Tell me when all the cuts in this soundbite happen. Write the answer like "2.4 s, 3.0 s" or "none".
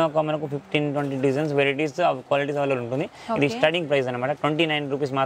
none